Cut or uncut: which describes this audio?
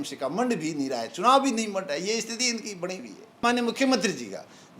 cut